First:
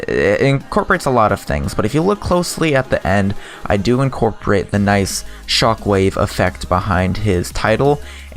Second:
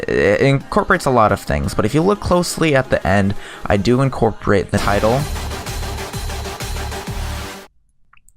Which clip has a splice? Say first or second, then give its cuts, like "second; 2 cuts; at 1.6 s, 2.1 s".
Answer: first; 1 cut; at 4.8 s